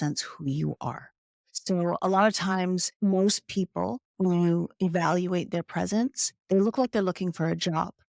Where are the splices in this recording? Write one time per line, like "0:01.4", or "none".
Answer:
0:02.9